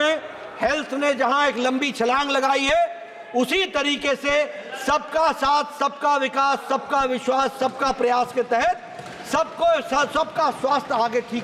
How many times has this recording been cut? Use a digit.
0